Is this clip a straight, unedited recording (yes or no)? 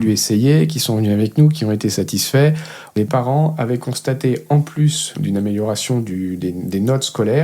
no